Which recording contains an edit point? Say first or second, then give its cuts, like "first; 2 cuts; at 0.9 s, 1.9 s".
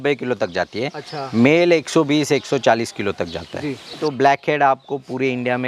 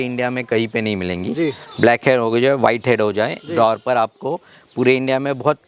first; 1 cut; at 3.9 s